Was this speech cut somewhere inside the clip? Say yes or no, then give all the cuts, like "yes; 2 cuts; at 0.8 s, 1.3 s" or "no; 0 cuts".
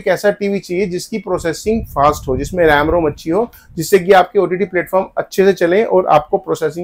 no; 0 cuts